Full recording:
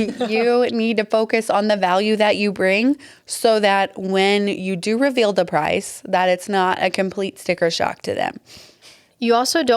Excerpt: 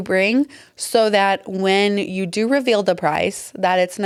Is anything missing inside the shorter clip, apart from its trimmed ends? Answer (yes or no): no